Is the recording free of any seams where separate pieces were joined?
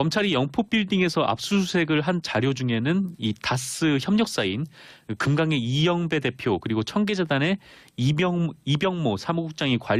yes; 0 cuts

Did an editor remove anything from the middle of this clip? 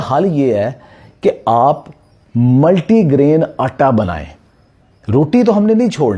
no; 0 cuts

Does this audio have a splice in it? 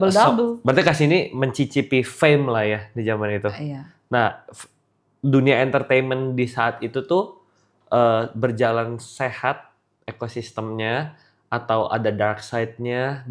no; 0 cuts

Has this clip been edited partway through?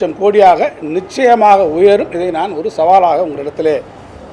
no; 0 cuts

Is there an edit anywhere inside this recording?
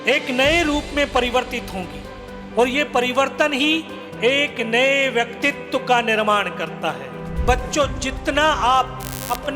yes; 1 cut; at 7.2 s

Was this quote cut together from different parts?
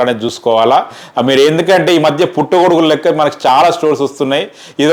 no; 0 cuts

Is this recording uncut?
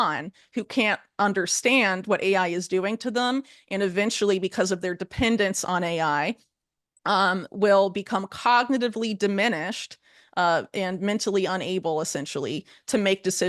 yes; 0 cuts

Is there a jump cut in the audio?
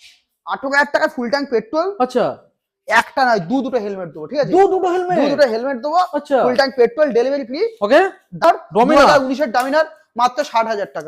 yes; 1 cut; at 8.4 s

